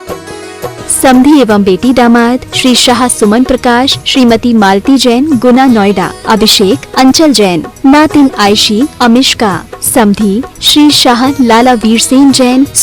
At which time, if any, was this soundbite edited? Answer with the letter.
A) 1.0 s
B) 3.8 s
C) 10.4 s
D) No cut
A